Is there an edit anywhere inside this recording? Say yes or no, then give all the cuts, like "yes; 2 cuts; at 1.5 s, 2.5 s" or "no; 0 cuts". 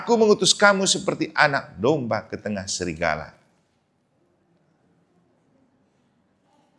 no; 0 cuts